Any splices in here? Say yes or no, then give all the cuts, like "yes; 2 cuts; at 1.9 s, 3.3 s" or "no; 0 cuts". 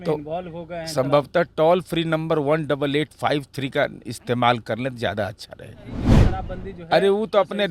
yes; 1 cut; at 6.1 s